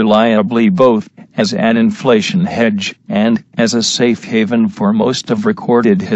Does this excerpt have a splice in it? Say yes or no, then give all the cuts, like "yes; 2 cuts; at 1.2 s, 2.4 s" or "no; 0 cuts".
yes; 1 cut; at 1.8 s